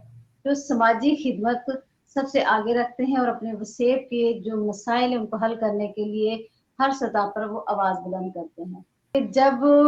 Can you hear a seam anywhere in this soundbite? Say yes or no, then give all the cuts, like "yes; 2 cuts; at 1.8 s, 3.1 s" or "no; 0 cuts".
yes; 1 cut; at 8.9 s